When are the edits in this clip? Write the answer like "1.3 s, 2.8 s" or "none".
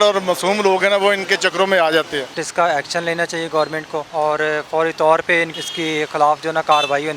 2.4 s, 4.1 s, 5.5 s

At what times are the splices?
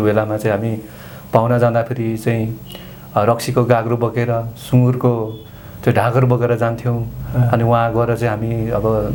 none

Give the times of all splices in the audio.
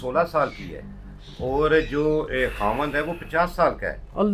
none

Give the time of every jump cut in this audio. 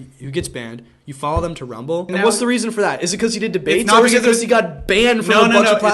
2.1 s

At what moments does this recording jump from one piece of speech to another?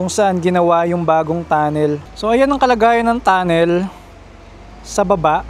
2.1 s

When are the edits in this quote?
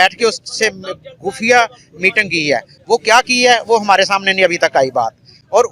none

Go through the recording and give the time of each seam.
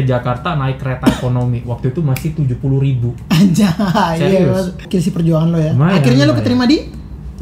4.9 s

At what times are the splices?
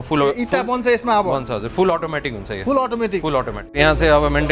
3.6 s

